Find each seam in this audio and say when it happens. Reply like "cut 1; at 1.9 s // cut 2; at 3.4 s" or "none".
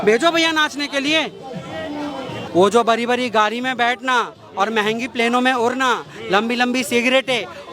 cut 1; at 2.5 s